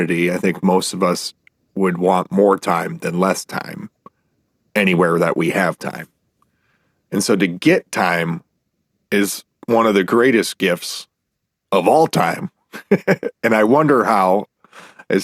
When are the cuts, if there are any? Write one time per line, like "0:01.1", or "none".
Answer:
none